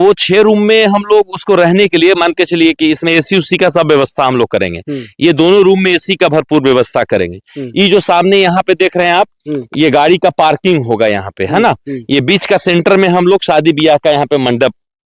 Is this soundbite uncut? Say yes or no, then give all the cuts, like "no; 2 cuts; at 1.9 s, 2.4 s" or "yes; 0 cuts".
yes; 0 cuts